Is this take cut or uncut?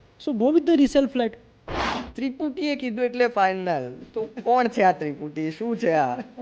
cut